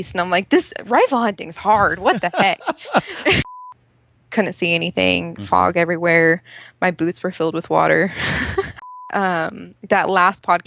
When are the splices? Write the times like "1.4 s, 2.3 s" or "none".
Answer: 3.6 s, 8.9 s